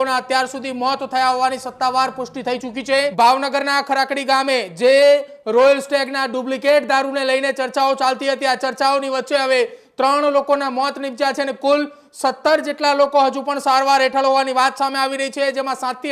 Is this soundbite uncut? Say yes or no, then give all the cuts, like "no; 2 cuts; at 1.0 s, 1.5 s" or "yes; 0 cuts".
no; 1 cut; at 3.1 s